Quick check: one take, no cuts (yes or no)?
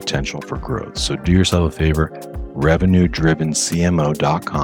yes